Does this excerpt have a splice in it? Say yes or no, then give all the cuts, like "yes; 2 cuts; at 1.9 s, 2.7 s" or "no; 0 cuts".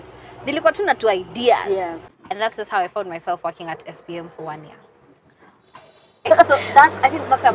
yes; 2 cuts; at 2.0 s, 6.3 s